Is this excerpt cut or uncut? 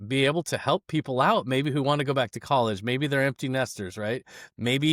uncut